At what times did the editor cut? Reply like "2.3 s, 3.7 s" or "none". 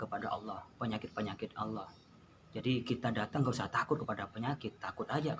none

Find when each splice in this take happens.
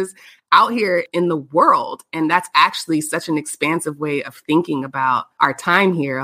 5.3 s

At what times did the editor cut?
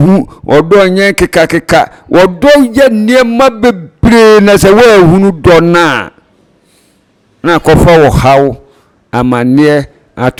none

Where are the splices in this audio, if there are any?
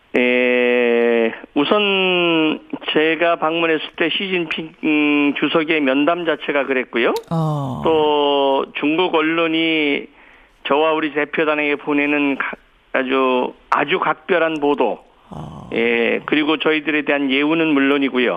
none

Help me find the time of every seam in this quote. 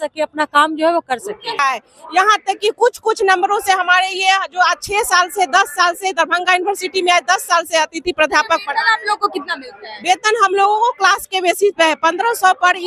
1.6 s

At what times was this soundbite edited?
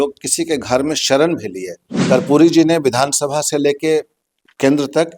2.0 s

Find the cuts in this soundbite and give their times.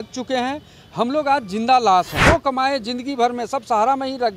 2.2 s

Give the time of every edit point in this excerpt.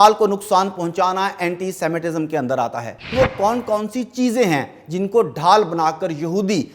3.1 s

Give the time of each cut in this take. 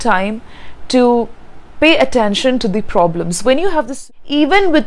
3.9 s

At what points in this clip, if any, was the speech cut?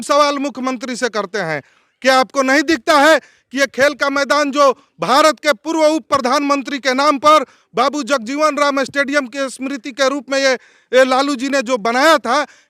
none

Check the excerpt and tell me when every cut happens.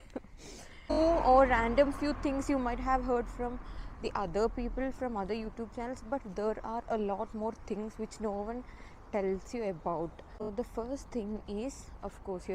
1.0 s, 10.4 s

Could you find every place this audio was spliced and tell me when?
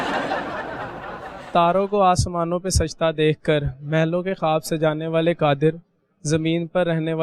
1.5 s

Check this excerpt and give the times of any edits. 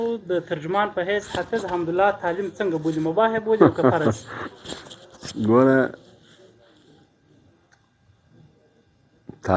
none

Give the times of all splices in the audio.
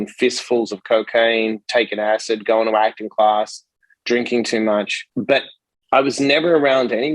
5.0 s

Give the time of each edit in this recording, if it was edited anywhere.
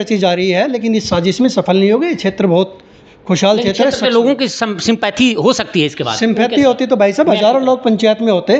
none

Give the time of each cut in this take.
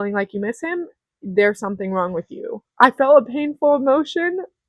2.6 s

